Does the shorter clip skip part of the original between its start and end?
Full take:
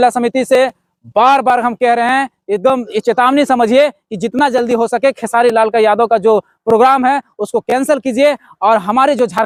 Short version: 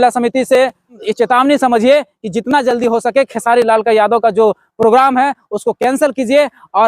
yes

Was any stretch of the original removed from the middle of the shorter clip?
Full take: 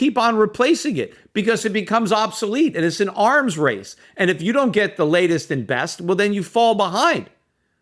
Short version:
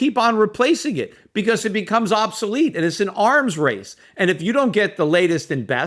no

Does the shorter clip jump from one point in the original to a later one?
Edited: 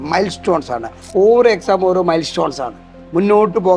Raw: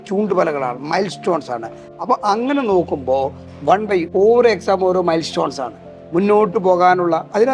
yes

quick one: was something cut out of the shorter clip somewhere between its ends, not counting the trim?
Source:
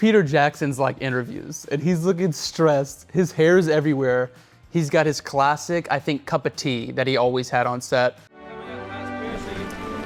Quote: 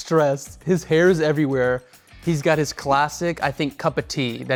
no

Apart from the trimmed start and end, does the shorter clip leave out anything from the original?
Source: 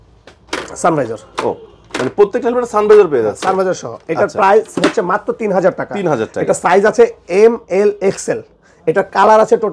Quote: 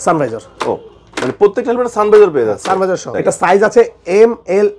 yes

